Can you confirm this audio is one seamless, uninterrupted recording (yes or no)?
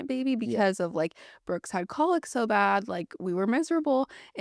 yes